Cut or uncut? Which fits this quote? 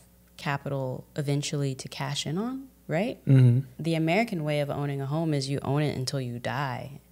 cut